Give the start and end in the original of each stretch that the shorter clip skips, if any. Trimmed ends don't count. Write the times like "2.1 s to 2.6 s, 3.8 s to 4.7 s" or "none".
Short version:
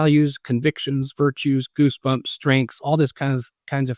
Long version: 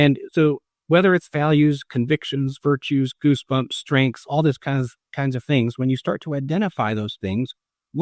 none

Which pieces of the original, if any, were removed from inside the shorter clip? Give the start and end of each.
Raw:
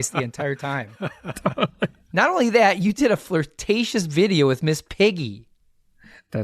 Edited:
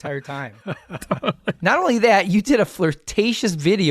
1.9 s to 2.1 s

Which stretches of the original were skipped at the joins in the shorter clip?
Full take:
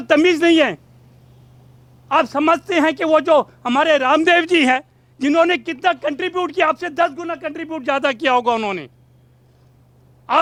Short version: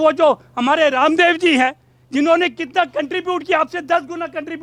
none

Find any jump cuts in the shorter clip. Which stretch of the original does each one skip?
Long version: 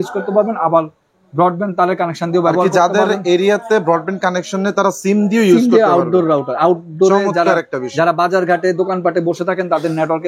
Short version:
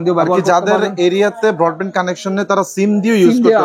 none

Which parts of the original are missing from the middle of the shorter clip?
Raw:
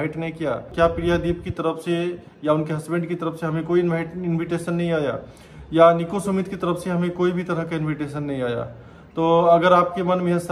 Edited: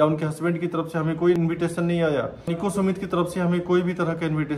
3.8 s to 4.3 s, 5.4 s to 6.0 s

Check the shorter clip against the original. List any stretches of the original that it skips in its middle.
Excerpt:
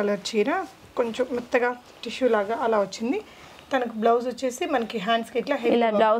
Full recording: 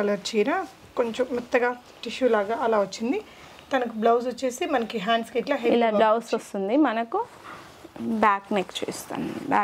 none

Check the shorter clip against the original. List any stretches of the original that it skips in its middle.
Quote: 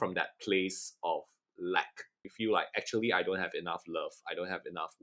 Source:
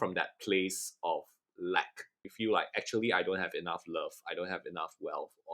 none

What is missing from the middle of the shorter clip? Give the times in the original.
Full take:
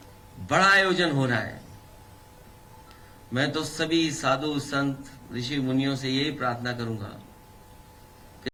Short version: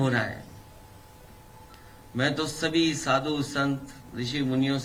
none

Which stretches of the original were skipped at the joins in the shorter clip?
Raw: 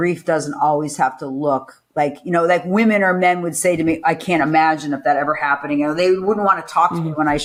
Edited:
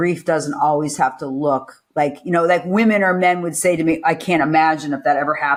none

